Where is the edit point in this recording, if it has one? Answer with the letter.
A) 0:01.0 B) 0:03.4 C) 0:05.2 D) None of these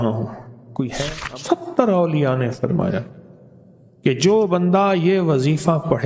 A